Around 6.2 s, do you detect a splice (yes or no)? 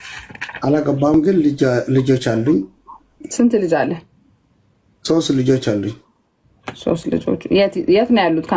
no